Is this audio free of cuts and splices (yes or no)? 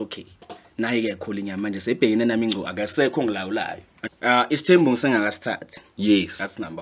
no